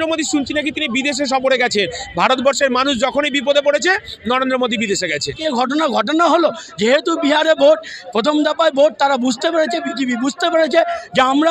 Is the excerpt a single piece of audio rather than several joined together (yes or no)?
no